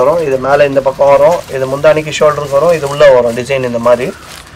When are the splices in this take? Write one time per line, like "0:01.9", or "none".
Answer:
none